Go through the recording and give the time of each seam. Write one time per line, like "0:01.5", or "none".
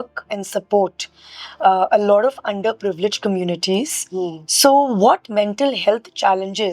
none